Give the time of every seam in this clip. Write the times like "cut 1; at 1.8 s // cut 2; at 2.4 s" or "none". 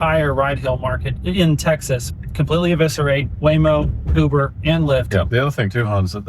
cut 1; at 1.1 s // cut 2; at 2.1 s // cut 3; at 5.3 s